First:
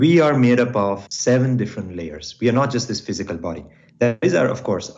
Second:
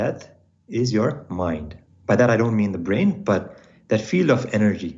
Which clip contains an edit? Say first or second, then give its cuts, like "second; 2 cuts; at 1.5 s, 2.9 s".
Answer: first; 1 cut; at 1.1 s